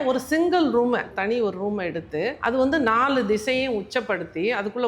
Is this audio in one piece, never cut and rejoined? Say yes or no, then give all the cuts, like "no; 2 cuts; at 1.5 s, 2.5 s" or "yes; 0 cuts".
no; 2 cuts; at 1.1 s, 2.4 s